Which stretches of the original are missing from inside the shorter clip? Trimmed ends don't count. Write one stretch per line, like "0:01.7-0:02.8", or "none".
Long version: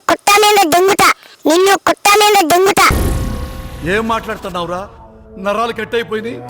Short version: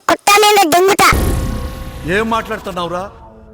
0:00.9-0:02.7